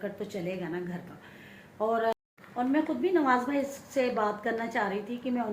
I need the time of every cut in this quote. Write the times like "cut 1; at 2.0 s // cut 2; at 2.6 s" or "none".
cut 1; at 2.1 s